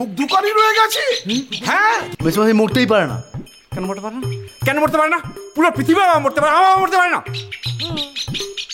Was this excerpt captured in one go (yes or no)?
no